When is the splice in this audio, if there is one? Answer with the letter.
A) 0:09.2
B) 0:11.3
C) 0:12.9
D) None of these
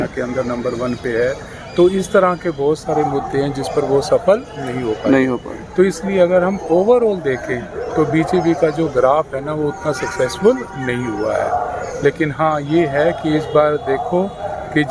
D